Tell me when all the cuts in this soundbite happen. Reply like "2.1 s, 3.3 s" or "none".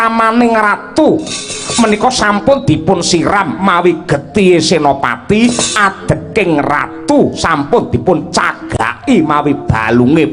none